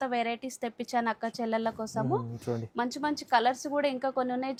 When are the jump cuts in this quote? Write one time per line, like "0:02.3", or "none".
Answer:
none